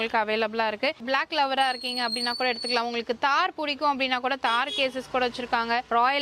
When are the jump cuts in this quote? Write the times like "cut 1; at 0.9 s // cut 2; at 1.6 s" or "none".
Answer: cut 1; at 1.0 s